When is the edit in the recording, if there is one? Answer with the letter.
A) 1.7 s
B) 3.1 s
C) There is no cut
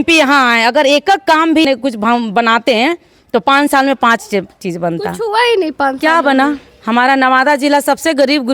A